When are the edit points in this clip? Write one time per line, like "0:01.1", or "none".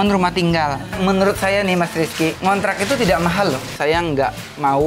0:00.9
0:02.4
0:03.7